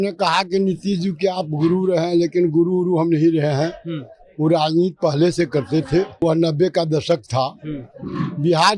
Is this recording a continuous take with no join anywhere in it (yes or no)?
no